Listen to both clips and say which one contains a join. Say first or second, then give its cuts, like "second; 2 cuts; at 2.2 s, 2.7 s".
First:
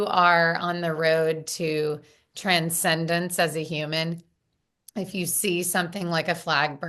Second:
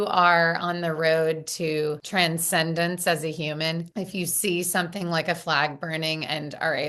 second; 2 cuts; at 2.0 s, 3.9 s